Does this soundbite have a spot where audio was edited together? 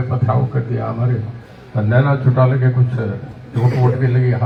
no; 0 cuts

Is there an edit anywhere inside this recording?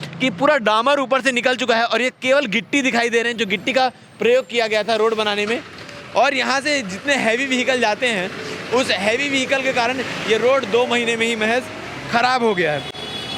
no; 0 cuts

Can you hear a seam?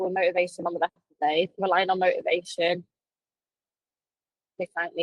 yes; 1 cut; at 1.5 s

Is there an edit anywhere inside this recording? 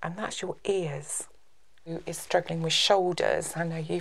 yes; 1 cut; at 2.0 s

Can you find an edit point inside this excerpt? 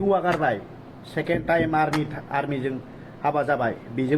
no; 0 cuts

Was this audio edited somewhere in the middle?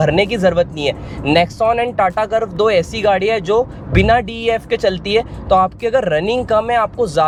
no; 0 cuts

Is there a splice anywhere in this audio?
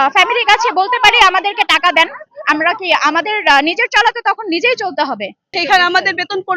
yes; 1 cut; at 5.5 s

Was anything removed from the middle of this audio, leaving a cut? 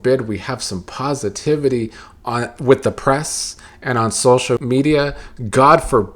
yes; 1 cut; at 4.6 s

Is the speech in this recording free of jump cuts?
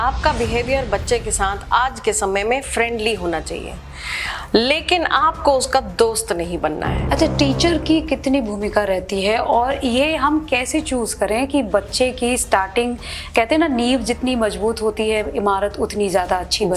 no; 1 cut; at 6.9 s

